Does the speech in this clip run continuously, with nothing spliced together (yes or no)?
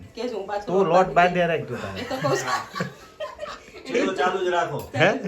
no